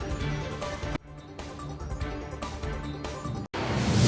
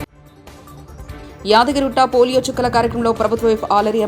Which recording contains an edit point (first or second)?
second